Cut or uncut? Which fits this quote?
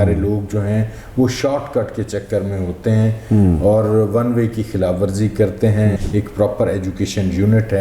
cut